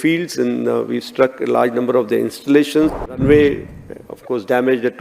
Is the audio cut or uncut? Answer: cut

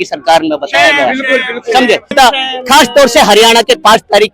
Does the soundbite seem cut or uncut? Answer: cut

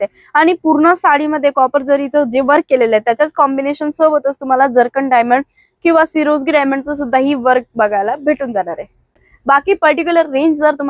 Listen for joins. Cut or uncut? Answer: cut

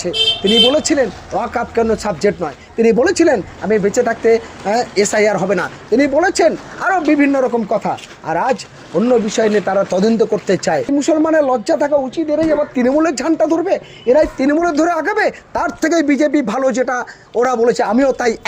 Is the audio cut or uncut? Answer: cut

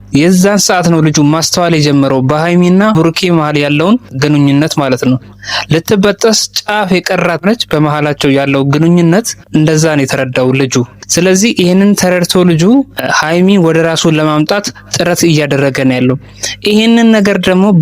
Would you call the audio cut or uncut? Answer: cut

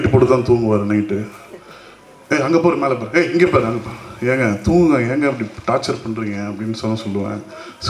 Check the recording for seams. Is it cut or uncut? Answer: uncut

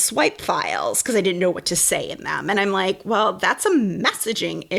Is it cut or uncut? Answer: uncut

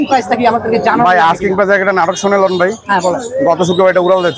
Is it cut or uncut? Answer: uncut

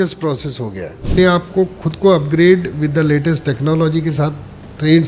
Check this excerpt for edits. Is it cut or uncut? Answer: cut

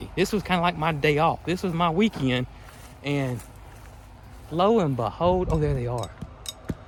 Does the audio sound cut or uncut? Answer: uncut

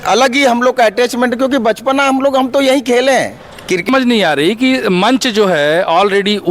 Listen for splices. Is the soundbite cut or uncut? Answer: cut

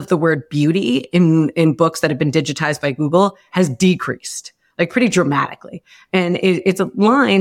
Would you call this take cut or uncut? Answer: uncut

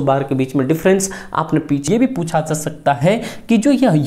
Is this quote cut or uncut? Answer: cut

